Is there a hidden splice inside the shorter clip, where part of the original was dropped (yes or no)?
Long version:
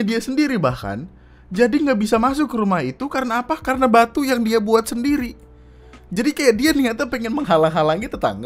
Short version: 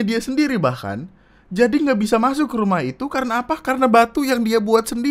no